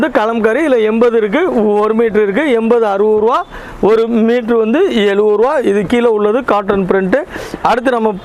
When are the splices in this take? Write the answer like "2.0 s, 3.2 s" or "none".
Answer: none

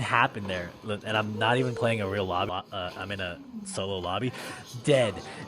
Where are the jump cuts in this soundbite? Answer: 2.5 s

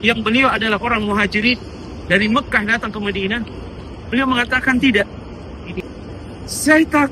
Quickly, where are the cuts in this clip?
5.8 s

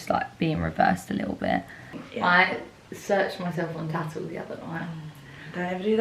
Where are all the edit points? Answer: 2.0 s

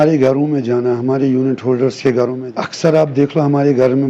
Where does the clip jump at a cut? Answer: 2.4 s

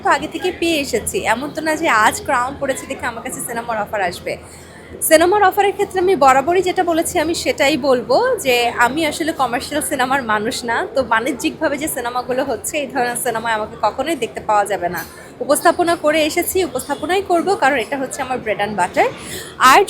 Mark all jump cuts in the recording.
none

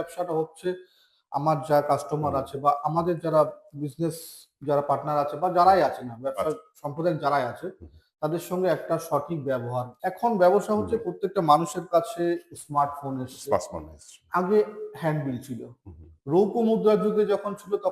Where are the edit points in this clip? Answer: 9.9 s

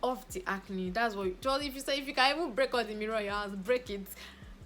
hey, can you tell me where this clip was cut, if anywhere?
none

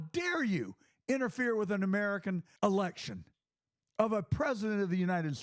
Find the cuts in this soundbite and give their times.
2.5 s

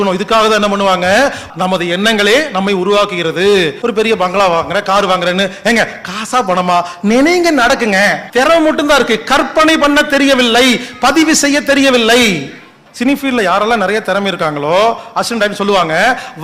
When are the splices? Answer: 1.4 s, 3.8 s, 8.2 s, 12.8 s

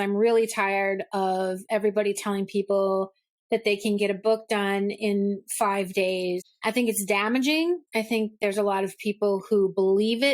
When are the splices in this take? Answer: 6.5 s

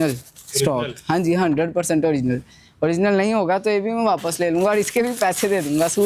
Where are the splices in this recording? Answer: none

